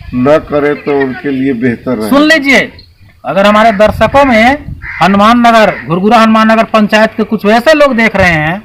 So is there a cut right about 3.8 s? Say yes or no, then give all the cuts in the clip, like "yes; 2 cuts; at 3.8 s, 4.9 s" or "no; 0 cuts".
no; 0 cuts